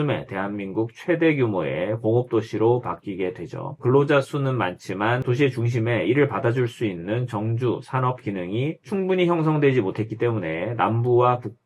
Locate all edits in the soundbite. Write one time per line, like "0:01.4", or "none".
0:03.8